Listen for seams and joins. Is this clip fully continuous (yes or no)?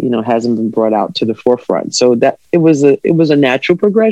yes